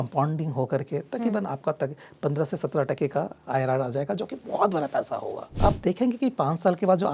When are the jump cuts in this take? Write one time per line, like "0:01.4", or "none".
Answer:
0:05.4